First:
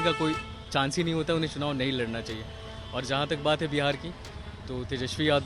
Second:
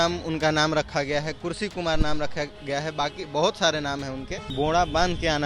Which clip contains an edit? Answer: second; 1 cut; at 4.4 s

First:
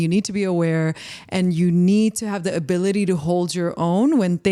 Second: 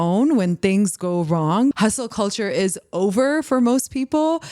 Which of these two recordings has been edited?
second; 1 cut; at 1.7 s

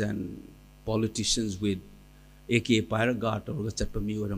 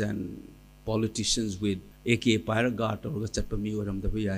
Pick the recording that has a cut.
second; 1 cut; at 1.9 s

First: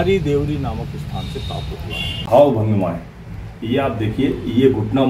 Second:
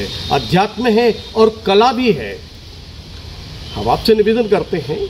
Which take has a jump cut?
first; 1 cut; at 2.3 s

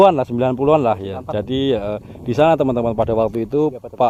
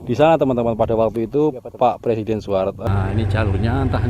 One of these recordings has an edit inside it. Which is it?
second; 1 cut; at 2.8 s

